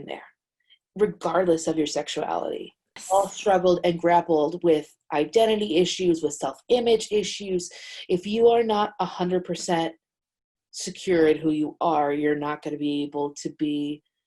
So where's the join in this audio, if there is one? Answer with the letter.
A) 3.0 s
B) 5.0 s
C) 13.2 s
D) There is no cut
A